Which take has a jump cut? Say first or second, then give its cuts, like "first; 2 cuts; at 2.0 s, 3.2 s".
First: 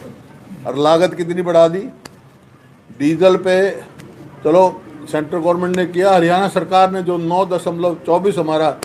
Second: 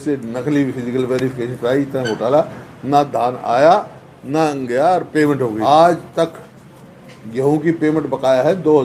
second; 1 cut; at 5.6 s